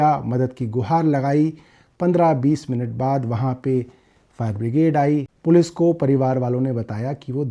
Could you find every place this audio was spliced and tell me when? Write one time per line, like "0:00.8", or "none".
0:05.3